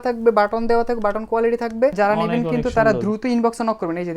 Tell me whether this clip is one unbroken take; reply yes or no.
no